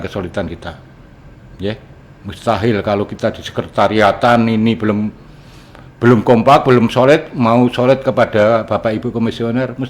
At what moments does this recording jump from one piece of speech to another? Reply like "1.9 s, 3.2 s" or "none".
none

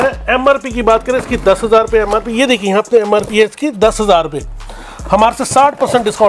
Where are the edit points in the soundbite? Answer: none

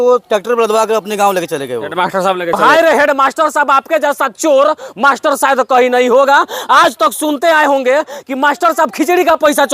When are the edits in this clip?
2.6 s

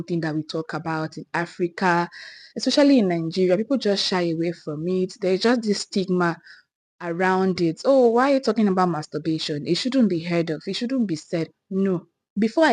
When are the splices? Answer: none

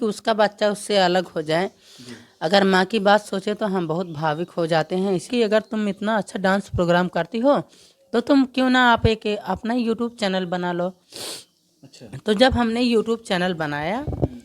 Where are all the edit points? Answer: 5.3 s

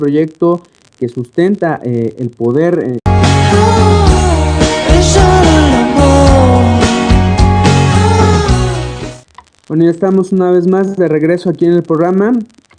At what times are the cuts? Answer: none

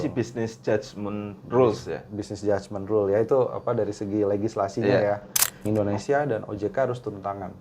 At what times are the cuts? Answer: 5.6 s

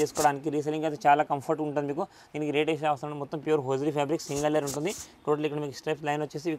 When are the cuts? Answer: none

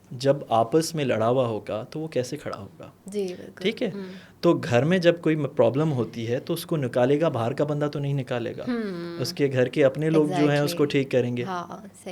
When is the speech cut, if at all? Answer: none

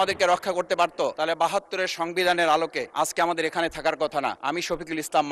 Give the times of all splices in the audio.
1.1 s, 2.8 s, 4.4 s

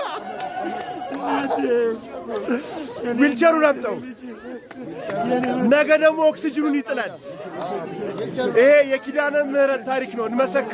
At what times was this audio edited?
none

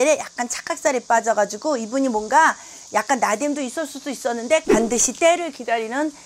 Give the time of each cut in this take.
4.7 s

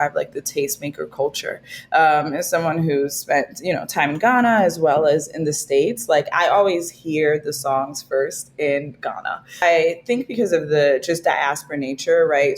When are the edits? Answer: 9.6 s

